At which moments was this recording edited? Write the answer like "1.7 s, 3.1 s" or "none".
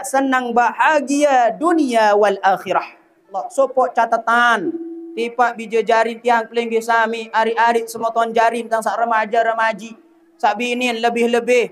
3.4 s